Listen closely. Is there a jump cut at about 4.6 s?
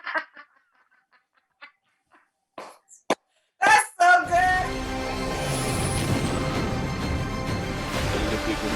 yes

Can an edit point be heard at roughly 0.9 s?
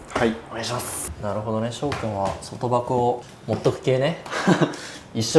no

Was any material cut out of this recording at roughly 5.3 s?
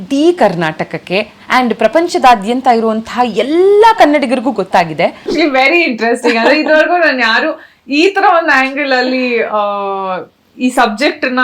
yes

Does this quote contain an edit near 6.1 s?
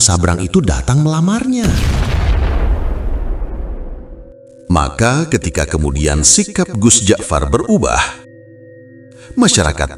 no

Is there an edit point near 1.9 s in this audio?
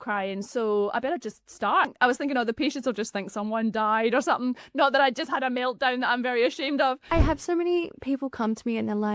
yes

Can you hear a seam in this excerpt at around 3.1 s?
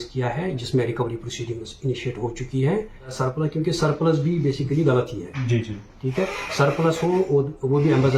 yes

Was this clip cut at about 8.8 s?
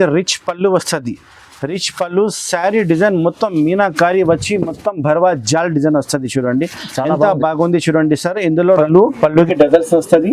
yes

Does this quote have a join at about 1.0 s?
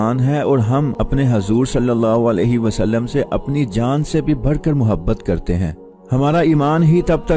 yes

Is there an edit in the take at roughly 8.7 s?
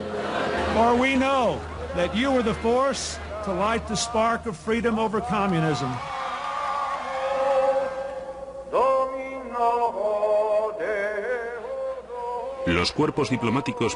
no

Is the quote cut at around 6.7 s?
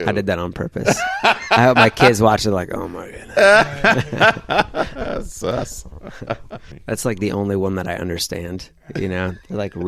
yes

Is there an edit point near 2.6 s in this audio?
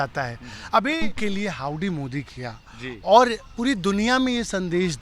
no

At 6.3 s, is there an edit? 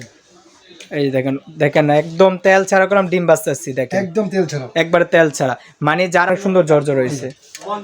yes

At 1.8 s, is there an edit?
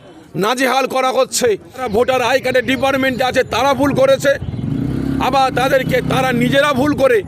yes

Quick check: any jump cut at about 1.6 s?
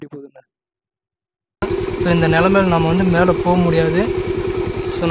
yes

